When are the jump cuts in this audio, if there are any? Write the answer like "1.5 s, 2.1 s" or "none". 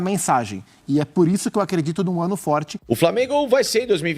2.7 s

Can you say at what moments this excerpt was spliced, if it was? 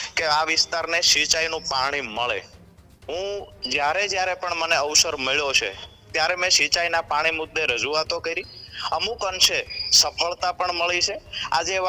none

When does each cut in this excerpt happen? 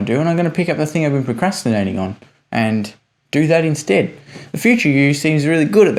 none

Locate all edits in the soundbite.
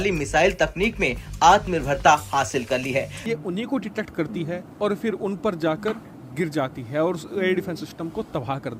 3.1 s

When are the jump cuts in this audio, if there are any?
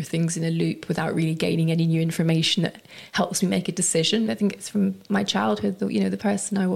4.3 s

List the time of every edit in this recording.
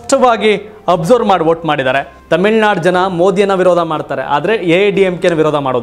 2.2 s

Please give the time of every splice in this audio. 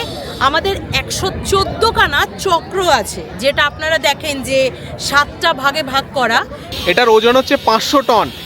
6.6 s

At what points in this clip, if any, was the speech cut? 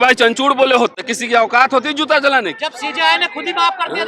1.1 s, 2.6 s

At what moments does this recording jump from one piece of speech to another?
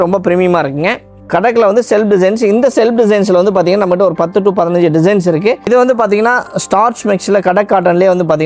none

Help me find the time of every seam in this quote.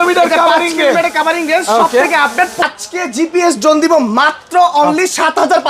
2.6 s

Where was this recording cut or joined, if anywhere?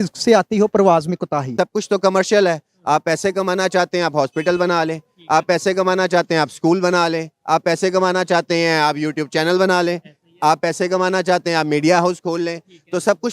1.5 s

